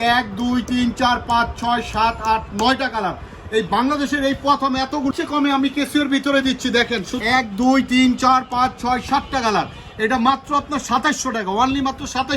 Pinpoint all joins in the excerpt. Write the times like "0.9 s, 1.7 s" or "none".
5.1 s, 7.1 s